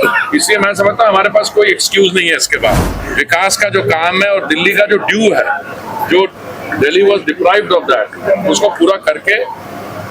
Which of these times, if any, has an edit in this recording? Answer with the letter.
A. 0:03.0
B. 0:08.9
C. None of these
A